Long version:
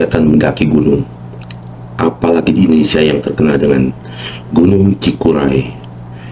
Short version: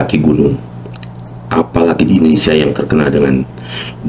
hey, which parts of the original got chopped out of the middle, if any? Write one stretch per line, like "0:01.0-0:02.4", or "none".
none

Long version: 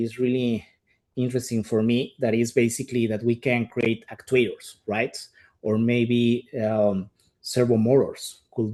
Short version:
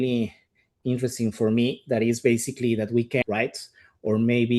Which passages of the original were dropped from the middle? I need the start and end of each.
0:03.5-0:04.8

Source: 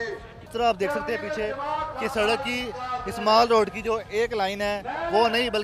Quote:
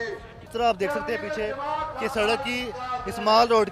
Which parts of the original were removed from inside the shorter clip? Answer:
none

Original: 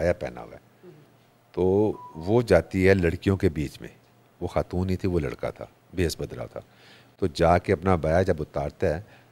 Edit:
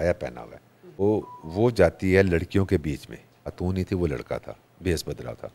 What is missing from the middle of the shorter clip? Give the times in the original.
0:01.0-0:01.7
0:04.3-0:04.7

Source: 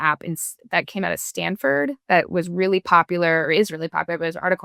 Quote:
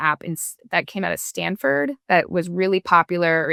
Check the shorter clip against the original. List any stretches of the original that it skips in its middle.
none

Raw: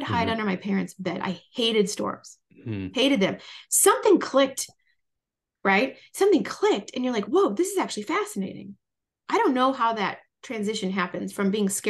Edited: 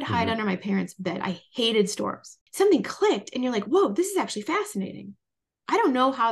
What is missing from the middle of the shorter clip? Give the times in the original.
0:02.4-0:06.0

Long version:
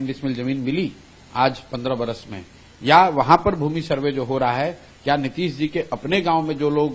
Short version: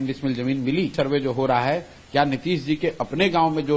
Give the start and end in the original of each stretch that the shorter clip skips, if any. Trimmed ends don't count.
0:00.9-0:03.8

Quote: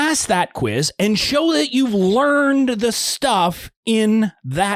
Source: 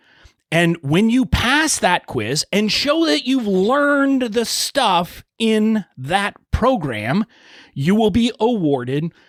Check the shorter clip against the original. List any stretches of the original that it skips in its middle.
none

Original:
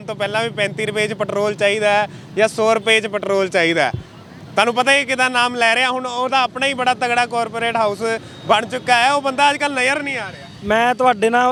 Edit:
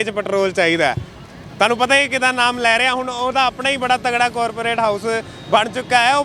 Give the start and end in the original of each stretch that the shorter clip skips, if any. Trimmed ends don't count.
none

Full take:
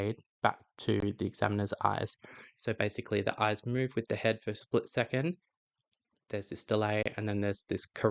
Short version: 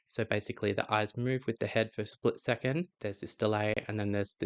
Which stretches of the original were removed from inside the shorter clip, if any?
0:05.4-0:06.2

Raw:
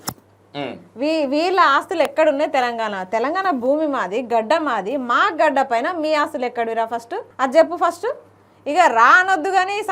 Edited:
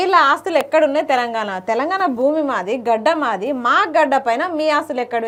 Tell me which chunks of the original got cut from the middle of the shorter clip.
none

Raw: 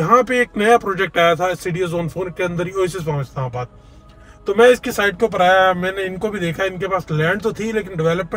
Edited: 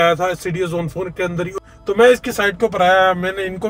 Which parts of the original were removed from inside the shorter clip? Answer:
0:02.7-0:04.1

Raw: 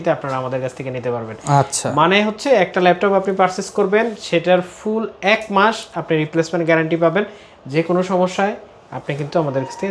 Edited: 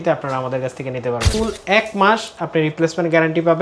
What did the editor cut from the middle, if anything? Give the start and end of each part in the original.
0:01.3-0:04.8

